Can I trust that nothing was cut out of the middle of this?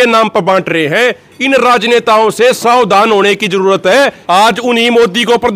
no; 1 cut; at 4.2 s

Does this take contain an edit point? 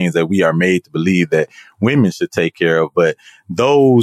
no; 0 cuts

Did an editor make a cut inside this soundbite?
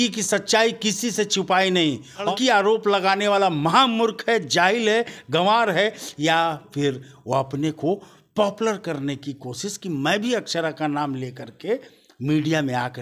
yes; 1 cut; at 2.3 s

